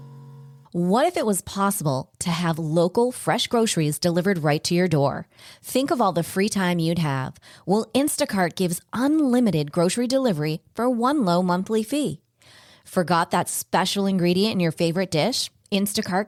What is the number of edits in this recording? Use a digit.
0